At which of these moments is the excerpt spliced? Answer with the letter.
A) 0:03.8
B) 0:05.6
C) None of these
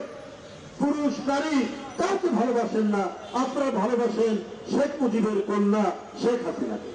C